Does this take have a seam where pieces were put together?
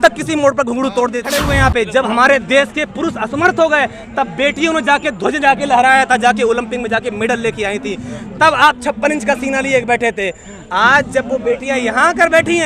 yes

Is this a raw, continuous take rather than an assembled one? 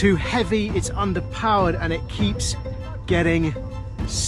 yes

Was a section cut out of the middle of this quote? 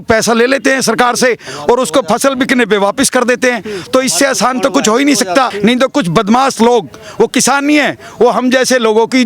yes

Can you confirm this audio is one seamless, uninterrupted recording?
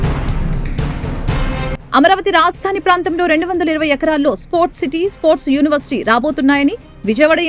no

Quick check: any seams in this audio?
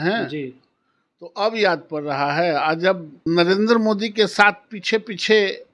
yes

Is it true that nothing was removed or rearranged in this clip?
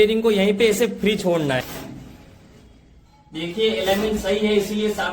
no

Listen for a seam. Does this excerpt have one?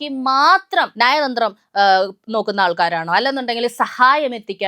yes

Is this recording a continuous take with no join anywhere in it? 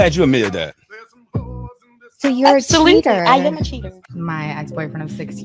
yes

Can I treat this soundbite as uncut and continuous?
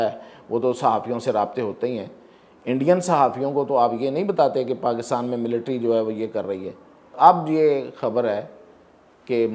no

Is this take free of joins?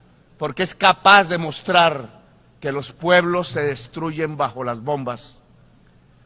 yes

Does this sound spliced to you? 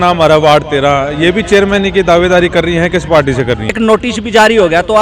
yes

